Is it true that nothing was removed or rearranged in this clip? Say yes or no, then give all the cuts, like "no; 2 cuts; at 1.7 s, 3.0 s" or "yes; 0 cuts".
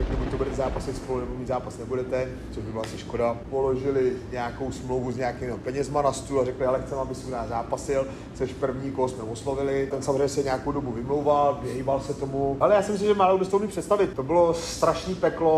no; 3 cuts; at 3.4 s, 9.9 s, 12.6 s